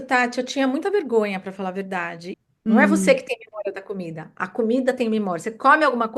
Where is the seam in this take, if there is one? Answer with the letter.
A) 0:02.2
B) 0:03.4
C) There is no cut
A